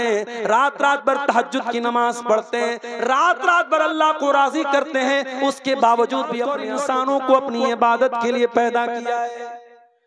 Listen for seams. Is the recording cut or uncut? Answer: cut